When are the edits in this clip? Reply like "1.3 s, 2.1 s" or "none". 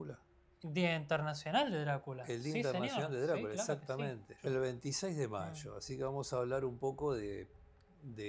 4.3 s